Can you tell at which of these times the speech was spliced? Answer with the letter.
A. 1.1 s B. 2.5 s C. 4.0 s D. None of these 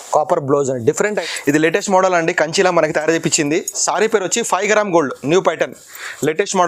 A